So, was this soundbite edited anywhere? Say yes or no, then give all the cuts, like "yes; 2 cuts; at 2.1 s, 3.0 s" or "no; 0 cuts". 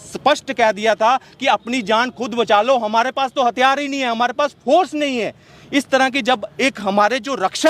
no; 0 cuts